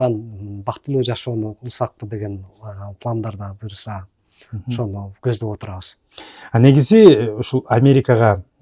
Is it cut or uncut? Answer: uncut